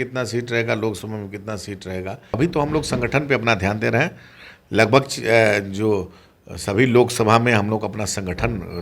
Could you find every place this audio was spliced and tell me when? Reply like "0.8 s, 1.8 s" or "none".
2.4 s